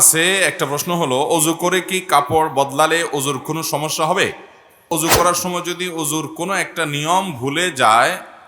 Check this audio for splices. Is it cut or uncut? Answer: cut